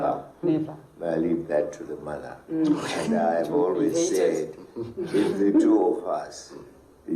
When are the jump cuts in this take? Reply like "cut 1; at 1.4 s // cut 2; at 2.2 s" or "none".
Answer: none

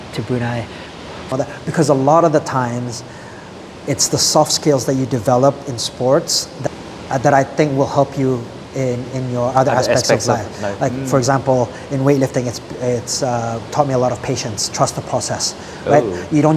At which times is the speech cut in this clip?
cut 1; at 1.3 s // cut 2; at 6.7 s

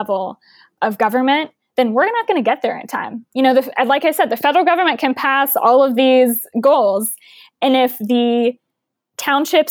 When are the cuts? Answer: none

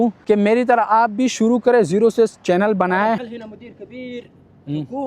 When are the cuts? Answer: cut 1; at 3.3 s

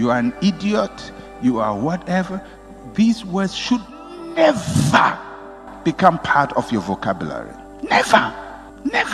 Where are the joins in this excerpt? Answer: none

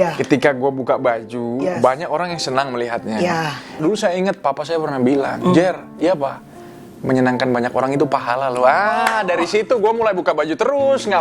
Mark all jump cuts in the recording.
none

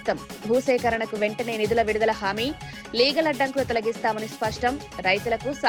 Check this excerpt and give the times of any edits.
none

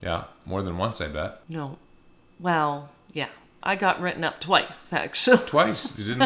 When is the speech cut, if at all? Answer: cut 1; at 1.4 s // cut 2; at 3.5 s

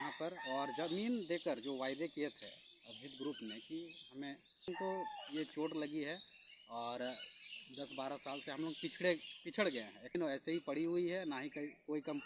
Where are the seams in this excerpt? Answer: cut 1; at 4.7 s // cut 2; at 10.2 s

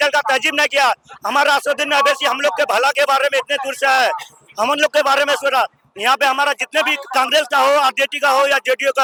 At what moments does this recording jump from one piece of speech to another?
none

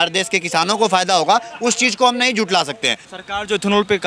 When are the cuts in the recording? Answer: cut 1; at 3.0 s

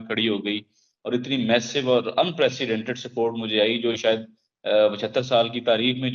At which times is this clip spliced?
none

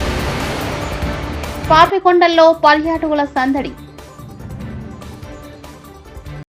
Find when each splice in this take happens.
none

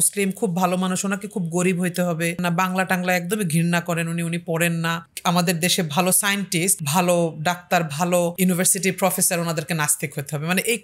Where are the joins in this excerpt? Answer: cut 1; at 2.4 s // cut 2; at 5.1 s // cut 3; at 6.8 s // cut 4; at 8.3 s

